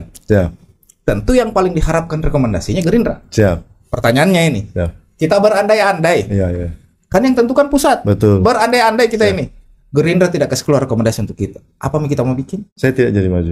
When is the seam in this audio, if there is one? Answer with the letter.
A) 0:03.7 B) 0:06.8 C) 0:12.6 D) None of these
C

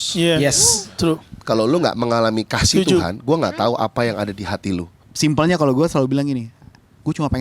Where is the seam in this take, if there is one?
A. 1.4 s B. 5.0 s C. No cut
B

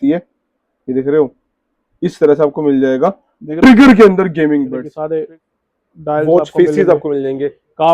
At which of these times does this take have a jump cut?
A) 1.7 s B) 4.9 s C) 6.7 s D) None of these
B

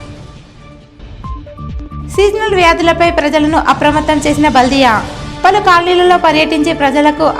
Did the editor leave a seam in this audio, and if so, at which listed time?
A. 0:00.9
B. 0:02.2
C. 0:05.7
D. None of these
A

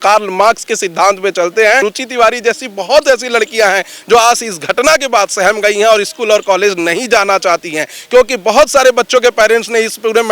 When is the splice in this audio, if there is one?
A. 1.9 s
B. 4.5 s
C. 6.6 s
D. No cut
A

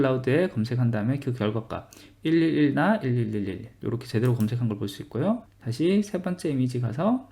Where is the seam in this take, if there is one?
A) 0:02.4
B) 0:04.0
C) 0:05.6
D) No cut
C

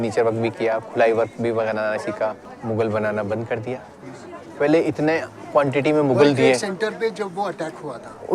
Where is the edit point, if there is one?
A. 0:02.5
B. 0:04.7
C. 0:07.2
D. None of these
A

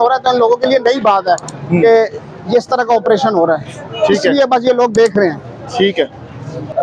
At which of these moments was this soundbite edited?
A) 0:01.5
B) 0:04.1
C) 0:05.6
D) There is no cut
D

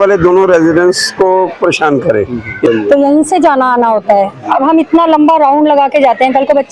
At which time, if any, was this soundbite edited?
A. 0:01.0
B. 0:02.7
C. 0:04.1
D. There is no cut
B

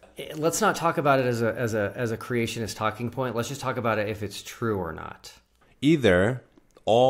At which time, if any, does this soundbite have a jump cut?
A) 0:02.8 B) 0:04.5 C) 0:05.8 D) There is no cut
C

